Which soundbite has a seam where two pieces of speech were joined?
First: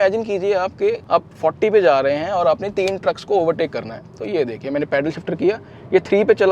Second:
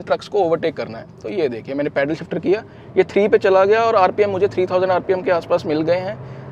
first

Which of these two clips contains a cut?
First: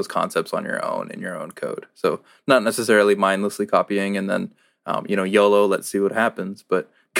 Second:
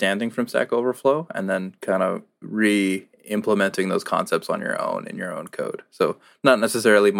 second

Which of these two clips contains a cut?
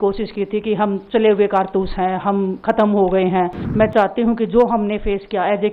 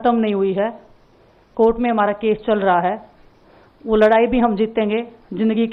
first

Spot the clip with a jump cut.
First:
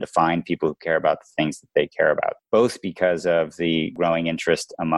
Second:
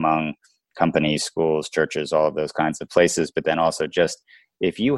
first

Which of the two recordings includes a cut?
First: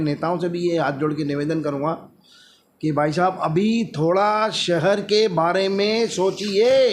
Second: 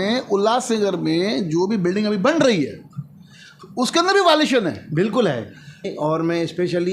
second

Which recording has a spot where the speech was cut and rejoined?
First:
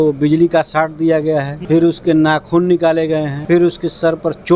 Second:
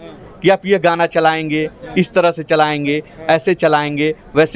first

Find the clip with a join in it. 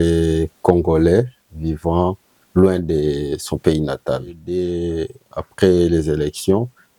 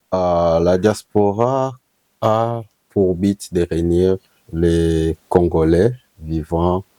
first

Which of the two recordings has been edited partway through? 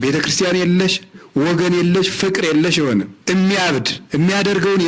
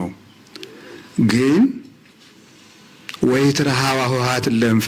first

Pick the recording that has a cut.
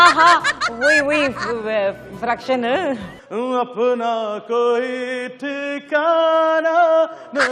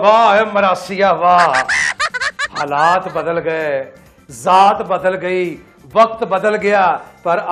first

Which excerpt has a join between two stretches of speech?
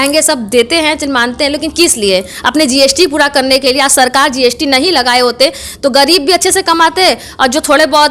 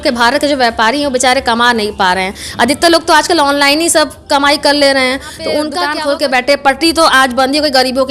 second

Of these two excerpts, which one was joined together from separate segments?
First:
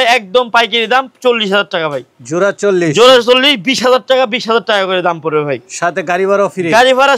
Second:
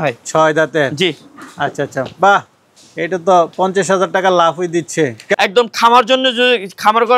second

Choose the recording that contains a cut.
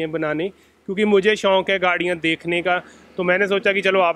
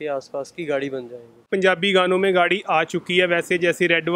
second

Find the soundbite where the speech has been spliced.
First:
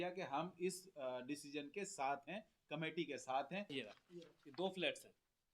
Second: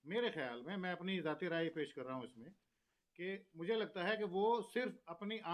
first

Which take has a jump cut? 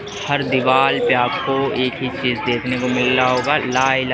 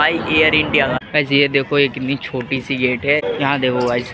second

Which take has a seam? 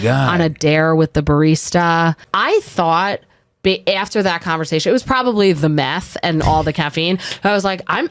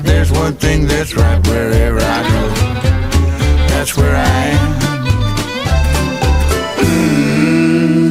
first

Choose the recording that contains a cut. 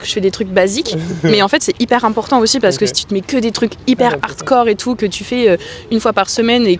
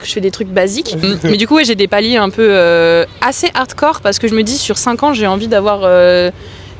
second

